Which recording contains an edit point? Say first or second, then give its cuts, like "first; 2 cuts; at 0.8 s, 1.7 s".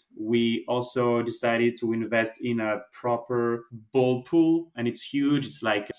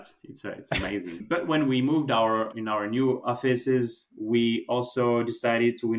second; 1 cut; at 1.2 s